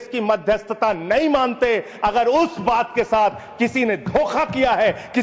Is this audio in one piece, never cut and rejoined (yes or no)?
yes